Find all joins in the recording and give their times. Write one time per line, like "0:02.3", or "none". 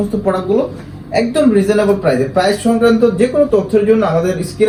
none